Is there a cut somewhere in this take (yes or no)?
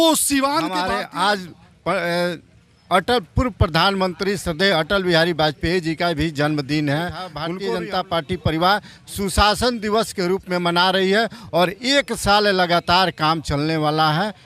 yes